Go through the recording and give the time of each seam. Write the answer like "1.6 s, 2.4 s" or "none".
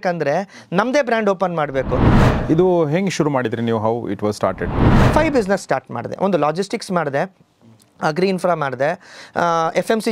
2.1 s, 5.0 s